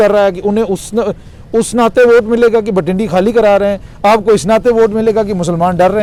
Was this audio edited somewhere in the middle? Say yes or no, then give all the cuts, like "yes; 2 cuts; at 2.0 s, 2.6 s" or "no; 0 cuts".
no; 0 cuts